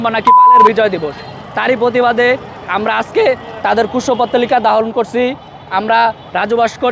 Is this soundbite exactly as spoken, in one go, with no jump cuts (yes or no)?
yes